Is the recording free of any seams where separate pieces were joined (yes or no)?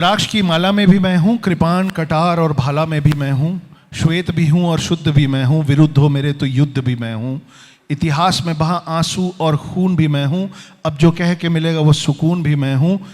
yes